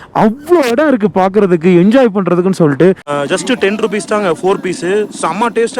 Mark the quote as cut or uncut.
cut